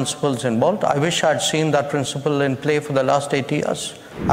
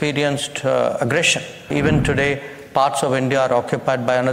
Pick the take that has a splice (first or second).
second